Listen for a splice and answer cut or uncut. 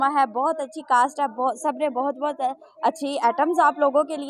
uncut